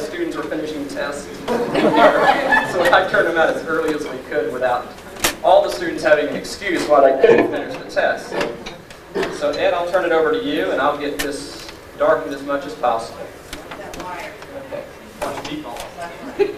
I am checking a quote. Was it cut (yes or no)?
yes